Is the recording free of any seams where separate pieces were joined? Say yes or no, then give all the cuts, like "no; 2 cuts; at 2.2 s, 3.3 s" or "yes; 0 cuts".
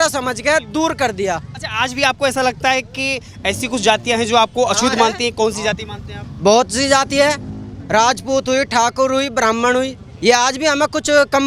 yes; 0 cuts